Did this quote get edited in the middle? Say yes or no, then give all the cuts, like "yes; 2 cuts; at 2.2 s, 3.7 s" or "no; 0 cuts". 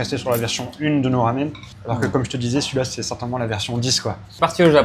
no; 0 cuts